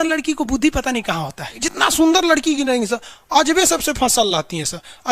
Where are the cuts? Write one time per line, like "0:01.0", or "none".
0:01.6

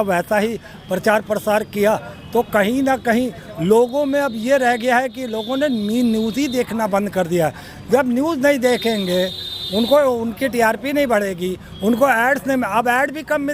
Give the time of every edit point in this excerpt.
none

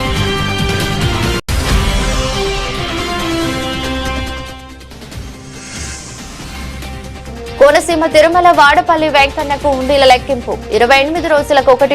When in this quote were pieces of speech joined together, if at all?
0:05.5

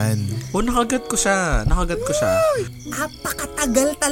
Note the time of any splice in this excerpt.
0:02.7

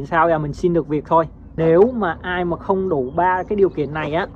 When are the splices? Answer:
0:01.5

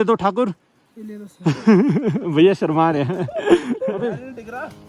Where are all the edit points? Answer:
0:03.9

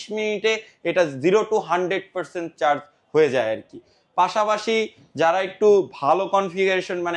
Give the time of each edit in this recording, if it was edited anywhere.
none

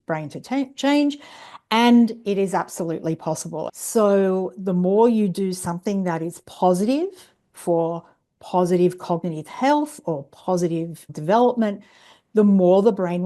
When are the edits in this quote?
0:03.7
0:11.0

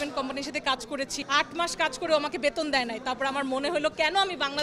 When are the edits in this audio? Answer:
0:01.2

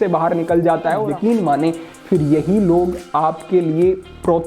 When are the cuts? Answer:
0:01.1

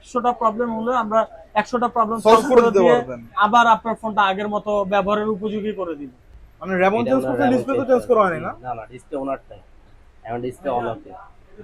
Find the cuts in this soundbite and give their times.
0:06.1

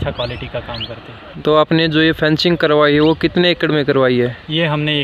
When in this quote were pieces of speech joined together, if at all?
0:01.2

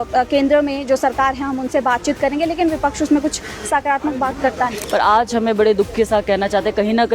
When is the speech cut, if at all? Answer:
0:04.8

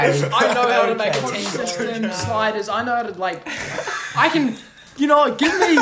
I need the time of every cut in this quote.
0:01.6

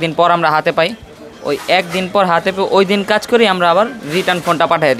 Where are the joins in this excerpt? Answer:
none

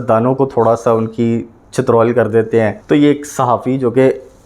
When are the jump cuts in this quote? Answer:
0:02.8

